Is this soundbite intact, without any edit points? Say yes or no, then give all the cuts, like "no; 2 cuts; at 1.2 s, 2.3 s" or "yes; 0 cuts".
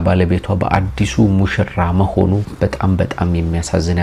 yes; 0 cuts